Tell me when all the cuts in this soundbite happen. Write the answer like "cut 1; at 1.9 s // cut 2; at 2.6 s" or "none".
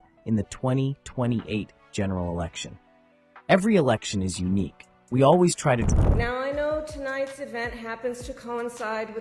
cut 1; at 5.9 s